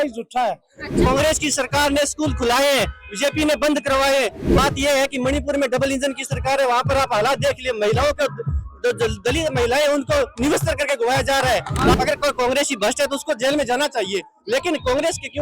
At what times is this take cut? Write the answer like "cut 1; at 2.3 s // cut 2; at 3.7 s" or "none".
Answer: cut 1; at 1.1 s // cut 2; at 4.6 s // cut 3; at 11.9 s